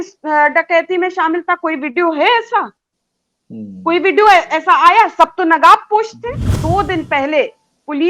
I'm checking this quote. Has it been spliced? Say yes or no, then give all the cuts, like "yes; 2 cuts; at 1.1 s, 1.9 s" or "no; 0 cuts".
yes; 1 cut; at 6.5 s